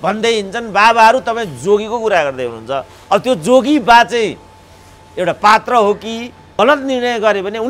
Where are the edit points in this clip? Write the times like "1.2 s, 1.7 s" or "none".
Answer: 6.4 s